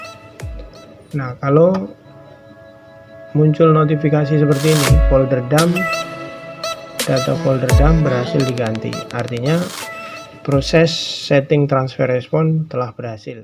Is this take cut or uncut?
uncut